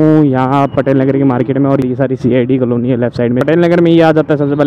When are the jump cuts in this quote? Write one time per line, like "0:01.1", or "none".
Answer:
0:01.8
0:03.4

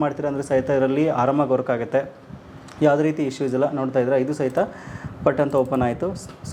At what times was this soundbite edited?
none

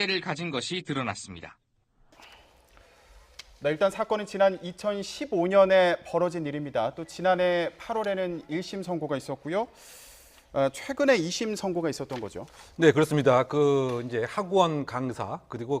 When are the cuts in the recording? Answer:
0:09.3

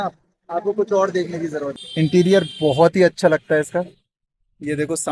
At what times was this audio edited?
0:01.8

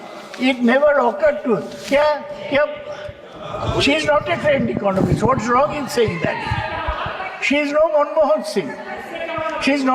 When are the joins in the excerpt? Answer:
none

